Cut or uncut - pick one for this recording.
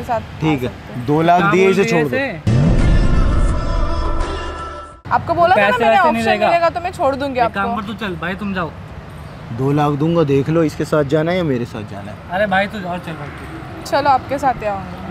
uncut